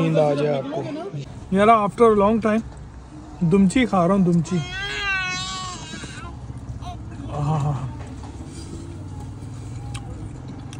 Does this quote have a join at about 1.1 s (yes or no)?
yes